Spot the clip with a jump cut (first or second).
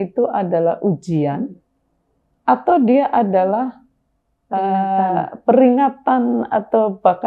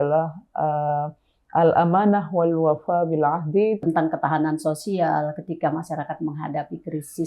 second